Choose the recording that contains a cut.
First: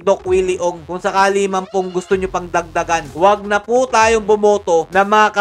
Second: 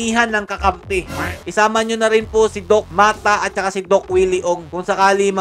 second; 1 cut; at 1.4 s

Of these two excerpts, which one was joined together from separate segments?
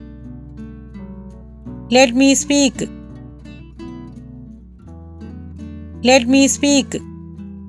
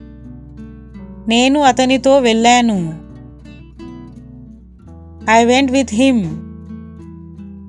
second; 4 cuts; at 1.2 s, 2.9 s, 5.2 s, 7.0 s

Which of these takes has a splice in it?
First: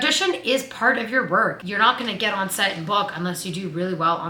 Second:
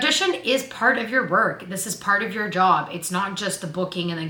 first; 1 cut; at 1.6 s

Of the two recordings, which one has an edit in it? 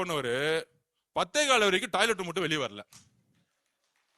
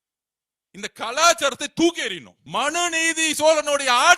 second; 1 cut; at 2.3 s

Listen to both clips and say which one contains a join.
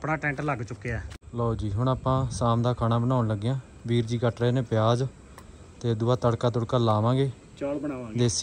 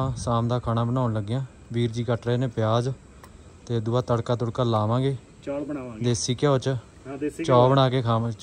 first; 1 cut; at 1.1 s

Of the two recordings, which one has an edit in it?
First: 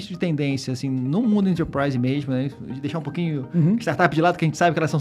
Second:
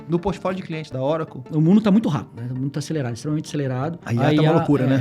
second; 3 cuts; at 1.3 s, 2.4 s, 4.0 s

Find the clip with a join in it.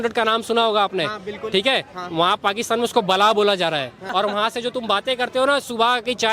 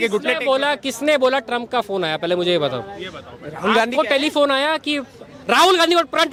first; 1 cut; at 4.0 s

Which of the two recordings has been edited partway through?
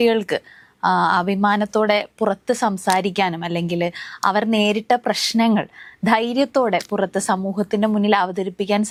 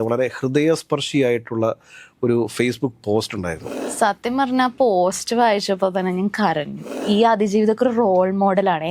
second; 2 cuts; at 3.7 s, 6.9 s

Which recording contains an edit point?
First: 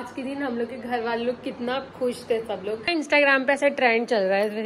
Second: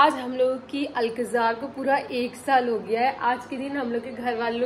first; 1 cut; at 2.8 s

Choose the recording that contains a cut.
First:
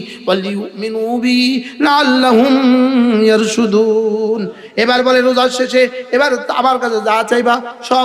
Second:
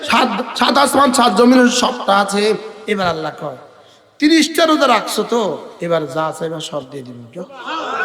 second; 2 cuts; at 2.7 s, 5.7 s

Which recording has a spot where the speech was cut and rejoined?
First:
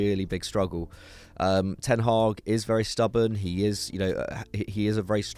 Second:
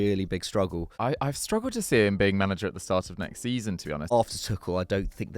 second; 2 cuts; at 0.9 s, 4.1 s

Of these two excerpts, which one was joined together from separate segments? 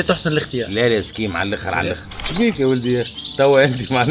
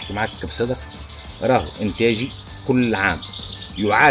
first; 1 cut; at 2.1 s

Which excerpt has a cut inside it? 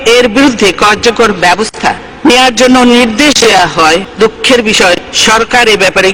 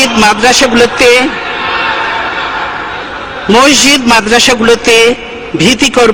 first; 3 cuts; at 2.1 s, 4.1 s, 5.1 s

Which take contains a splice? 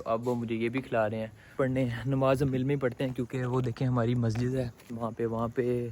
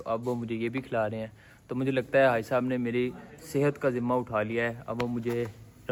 first; 1 cut; at 1.5 s

